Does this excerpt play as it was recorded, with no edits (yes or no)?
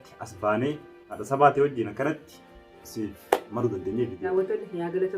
no